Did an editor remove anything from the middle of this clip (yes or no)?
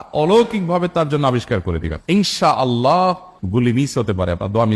yes